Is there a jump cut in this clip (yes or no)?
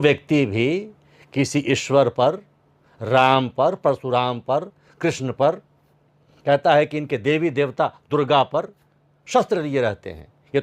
no